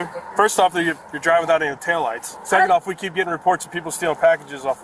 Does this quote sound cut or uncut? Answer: uncut